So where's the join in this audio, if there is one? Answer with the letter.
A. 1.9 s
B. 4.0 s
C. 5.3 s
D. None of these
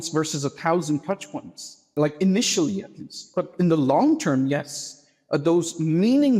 A